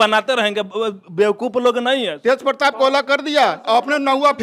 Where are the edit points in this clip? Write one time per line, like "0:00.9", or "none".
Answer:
0:02.1

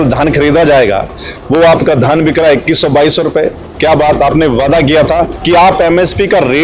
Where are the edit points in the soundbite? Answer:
0:05.4

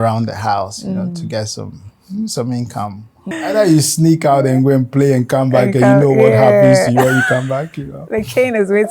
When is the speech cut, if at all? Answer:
0:03.2

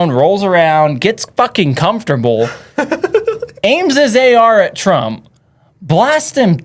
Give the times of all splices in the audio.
none

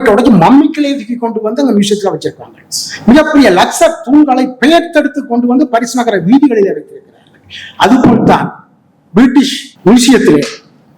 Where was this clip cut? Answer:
0:09.6

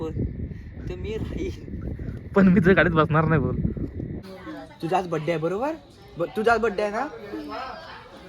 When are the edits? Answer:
0:04.2

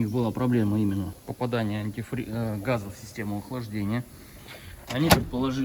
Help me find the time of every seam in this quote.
0:01.2

